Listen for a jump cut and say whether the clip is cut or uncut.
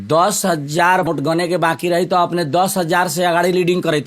cut